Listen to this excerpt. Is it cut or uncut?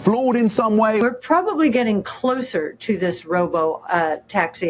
cut